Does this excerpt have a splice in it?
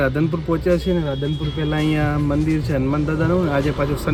no; 0 cuts

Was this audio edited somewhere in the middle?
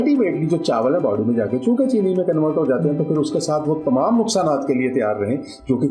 no; 0 cuts

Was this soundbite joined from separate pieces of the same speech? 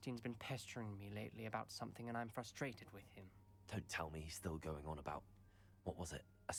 no; 0 cuts

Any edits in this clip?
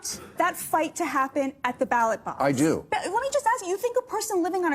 yes; 1 cut; at 2.9 s

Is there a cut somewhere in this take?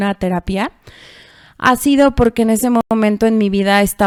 no; 0 cuts

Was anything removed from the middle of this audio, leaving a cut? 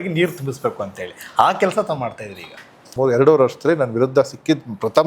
yes; 1 cut; at 2.9 s

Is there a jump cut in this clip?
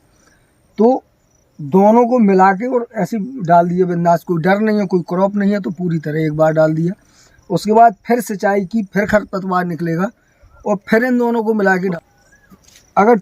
yes; 1 cut; at 11.9 s

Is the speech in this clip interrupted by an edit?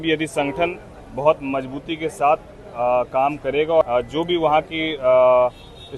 yes; 1 cut; at 3.8 s

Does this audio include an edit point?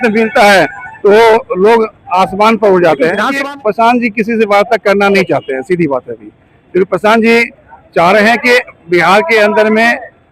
yes; 1 cut; at 3.3 s

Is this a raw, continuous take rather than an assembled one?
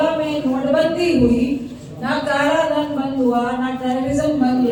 yes; 0 cuts

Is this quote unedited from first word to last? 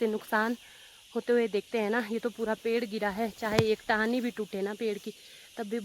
yes; 0 cuts

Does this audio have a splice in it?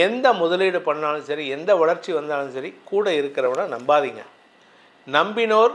no; 0 cuts

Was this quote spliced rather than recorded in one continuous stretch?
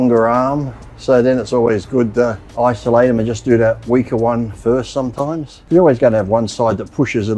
yes; 2 cuts; at 2.4 s, 5.5 s

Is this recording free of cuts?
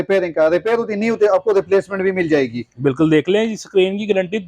yes; 0 cuts

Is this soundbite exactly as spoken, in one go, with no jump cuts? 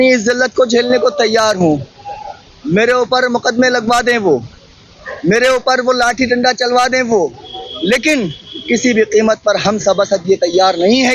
yes; 0 cuts

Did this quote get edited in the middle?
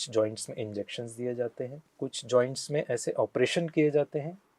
yes; 1 cut; at 1.8 s

